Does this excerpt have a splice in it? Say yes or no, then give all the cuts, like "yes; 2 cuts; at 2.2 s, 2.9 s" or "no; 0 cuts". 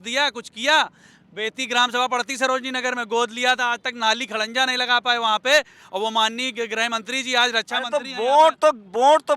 no; 0 cuts